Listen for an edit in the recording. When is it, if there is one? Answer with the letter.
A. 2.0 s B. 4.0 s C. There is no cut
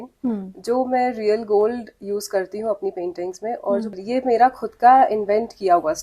B